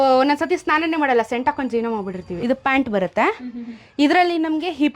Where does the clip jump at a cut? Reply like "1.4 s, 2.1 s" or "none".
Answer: 2.2 s